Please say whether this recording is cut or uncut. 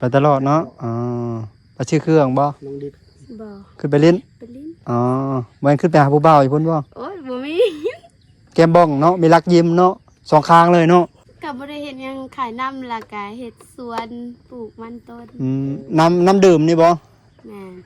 cut